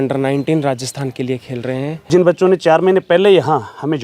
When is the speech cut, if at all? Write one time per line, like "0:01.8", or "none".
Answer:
0:02.1